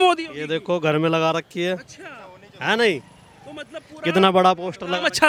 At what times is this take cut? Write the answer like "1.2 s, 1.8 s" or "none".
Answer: none